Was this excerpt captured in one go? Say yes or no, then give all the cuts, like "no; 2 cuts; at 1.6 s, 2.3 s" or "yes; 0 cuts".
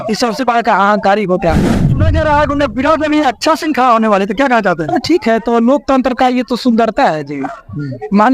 no; 1 cut; at 1.9 s